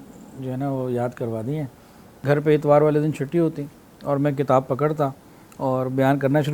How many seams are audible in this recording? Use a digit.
1